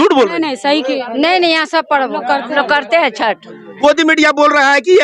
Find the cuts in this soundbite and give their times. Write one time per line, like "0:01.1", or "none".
0:03.7